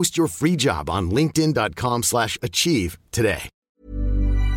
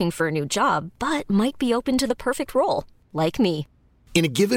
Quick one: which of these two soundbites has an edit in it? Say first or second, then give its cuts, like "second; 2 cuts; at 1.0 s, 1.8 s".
first; 1 cut; at 3.5 s